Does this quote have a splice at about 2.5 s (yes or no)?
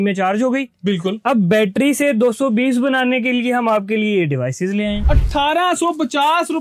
no